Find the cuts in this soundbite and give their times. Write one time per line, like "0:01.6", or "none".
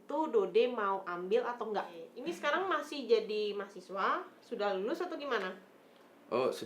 0:02.1

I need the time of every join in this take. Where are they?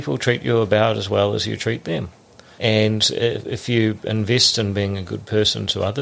0:02.5

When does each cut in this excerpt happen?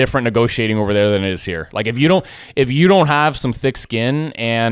none

